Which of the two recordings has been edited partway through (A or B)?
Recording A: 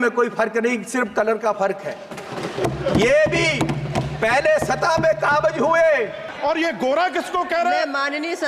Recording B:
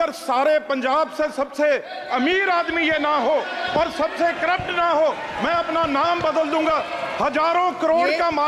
A